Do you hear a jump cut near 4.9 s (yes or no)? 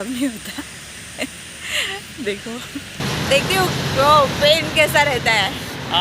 no